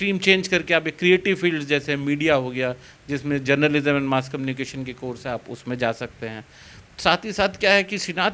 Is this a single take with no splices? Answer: yes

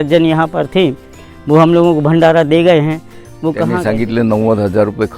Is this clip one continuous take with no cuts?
no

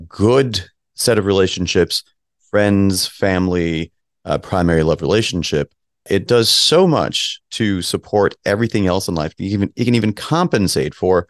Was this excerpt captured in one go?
yes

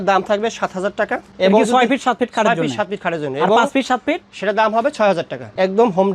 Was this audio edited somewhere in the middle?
no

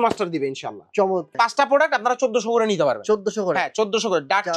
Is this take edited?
yes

